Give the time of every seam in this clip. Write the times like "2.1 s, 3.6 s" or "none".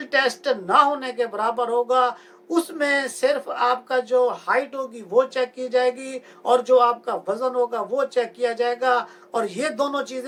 none